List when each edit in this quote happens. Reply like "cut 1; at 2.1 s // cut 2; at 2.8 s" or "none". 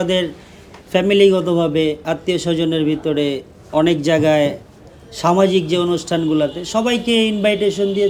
none